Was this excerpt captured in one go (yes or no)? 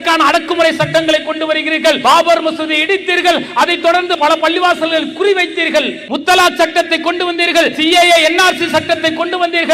no